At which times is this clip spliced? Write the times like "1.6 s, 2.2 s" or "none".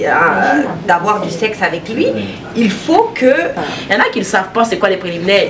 3.7 s